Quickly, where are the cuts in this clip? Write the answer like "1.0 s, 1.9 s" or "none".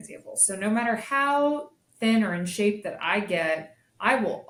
none